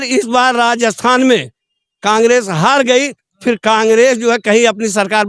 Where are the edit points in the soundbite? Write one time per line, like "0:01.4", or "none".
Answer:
none